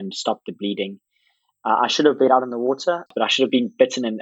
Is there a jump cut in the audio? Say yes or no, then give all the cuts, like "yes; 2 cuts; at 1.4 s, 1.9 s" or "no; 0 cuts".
yes; 1 cut; at 3.1 s